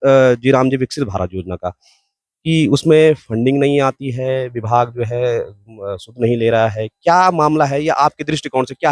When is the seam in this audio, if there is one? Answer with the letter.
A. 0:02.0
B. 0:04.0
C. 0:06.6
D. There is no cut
D